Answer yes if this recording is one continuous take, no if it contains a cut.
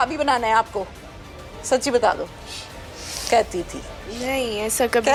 yes